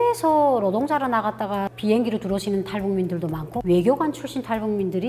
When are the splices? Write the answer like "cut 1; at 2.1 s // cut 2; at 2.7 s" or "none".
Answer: cut 1; at 1.7 s